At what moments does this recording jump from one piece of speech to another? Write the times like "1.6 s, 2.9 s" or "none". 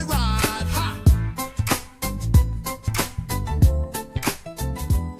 none